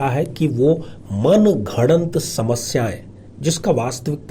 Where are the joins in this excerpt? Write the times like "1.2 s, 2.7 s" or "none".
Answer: none